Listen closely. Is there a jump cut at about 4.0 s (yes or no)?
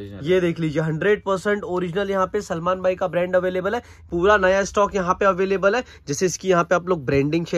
yes